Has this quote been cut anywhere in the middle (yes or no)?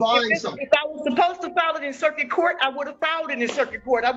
no